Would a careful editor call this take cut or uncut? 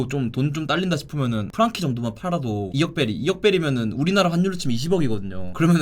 cut